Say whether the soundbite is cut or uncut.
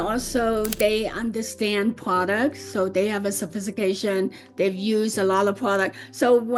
uncut